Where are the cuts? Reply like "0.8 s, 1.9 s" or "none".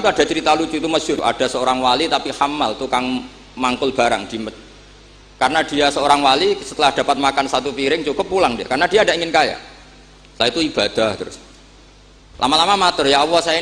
1.2 s